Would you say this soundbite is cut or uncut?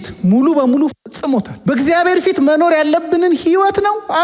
cut